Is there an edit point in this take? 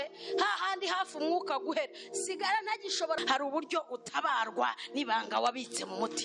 yes; 1 cut; at 3.2 s

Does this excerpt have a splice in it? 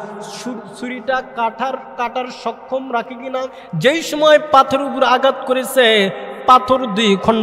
yes; 1 cut; at 3.6 s

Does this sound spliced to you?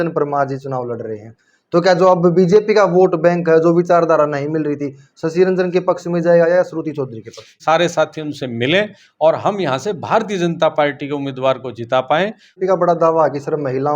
yes; 2 cuts; at 7.6 s, 12.5 s

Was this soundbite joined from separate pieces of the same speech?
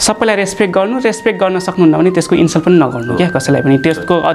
no; 0 cuts

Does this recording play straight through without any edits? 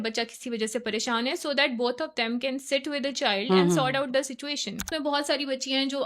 no; 1 cut; at 4.9 s

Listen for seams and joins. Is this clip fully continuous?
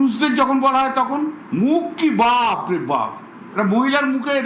yes; 0 cuts

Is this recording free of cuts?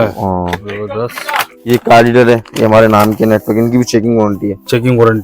no; 1 cut; at 1.5 s

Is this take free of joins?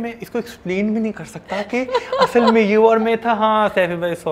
yes; 0 cuts

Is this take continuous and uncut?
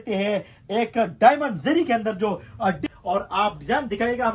no; 1 cut; at 2.8 s

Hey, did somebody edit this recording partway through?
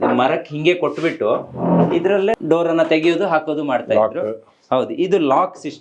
no; 0 cuts

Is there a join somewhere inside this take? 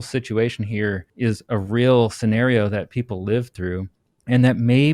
yes; 1 cut; at 1.1 s

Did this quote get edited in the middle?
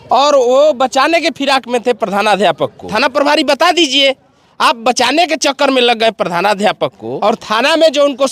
yes; 2 cuts; at 2.8 s, 7.1 s

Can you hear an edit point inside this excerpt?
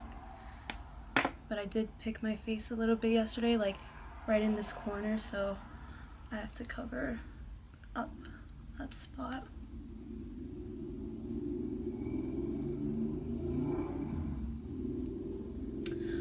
no; 0 cuts

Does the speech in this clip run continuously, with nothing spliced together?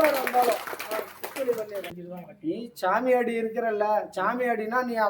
no; 1 cut; at 1.8 s

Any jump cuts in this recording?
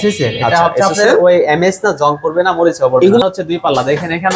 yes; 1 cut; at 3.2 s

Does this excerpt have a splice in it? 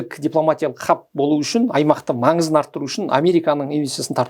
no; 0 cuts

